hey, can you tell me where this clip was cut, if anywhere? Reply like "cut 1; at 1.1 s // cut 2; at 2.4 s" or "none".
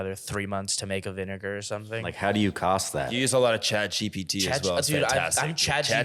cut 1; at 2.1 s // cut 2; at 3.2 s